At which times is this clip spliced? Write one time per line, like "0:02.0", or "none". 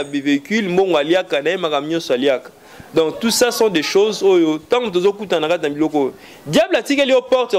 none